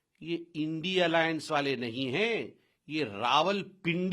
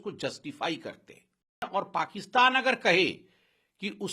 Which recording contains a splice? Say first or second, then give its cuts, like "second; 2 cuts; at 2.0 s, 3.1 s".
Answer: second; 1 cut; at 1.7 s